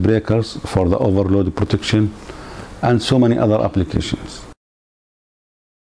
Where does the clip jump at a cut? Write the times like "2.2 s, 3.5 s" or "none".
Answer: none